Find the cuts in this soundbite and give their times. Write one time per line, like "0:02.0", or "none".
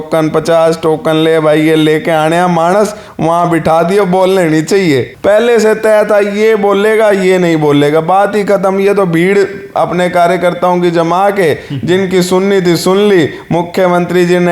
0:05.1